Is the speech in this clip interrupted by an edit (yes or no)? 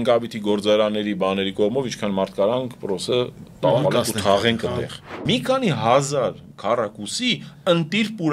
yes